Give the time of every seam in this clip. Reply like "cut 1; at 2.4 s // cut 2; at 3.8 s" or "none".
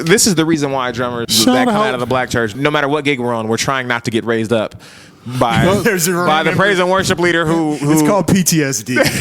cut 1; at 1.2 s // cut 2; at 2.5 s